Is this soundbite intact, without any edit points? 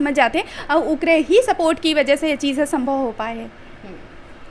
yes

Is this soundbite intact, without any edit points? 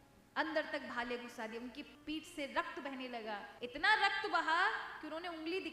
no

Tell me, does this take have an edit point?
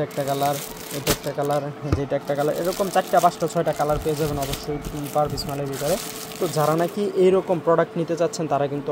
no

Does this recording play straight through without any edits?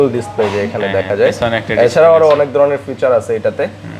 yes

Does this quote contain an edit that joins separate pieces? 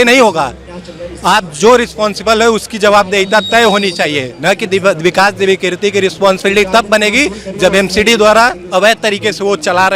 no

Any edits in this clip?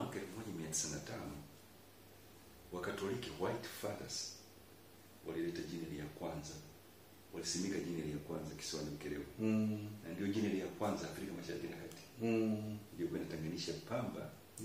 no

